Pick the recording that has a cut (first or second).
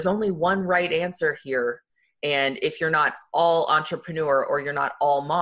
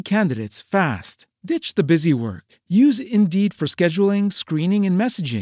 first